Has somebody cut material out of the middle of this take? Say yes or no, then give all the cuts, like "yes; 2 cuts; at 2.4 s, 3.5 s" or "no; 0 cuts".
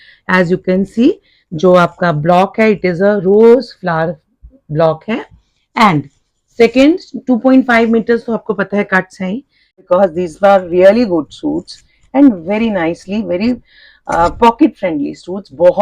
yes; 1 cut; at 9.8 s